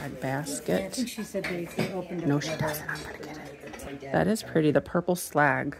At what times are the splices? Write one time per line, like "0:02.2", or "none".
0:03.9